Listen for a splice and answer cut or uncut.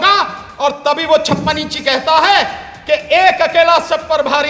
uncut